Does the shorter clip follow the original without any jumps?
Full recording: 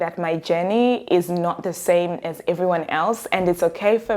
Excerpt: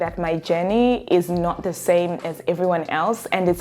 yes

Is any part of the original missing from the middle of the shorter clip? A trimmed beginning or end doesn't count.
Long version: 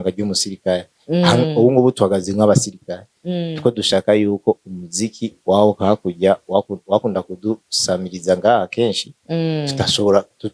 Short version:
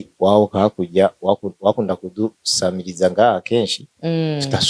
no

